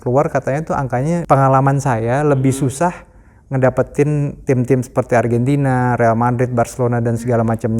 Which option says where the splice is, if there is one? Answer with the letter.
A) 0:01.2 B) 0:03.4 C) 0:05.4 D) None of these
A